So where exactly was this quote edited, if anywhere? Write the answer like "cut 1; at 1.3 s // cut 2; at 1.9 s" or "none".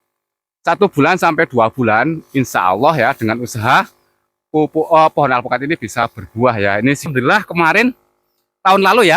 cut 1; at 7.1 s